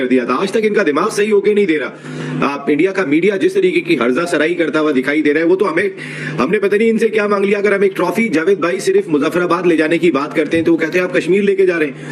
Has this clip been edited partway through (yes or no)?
no